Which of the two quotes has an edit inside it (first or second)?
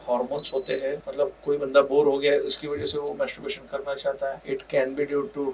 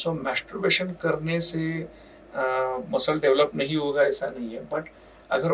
first